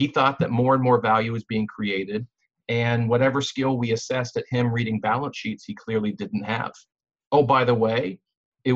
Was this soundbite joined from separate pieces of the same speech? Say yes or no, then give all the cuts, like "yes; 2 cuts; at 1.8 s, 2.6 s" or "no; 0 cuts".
yes; 1 cut; at 7.1 s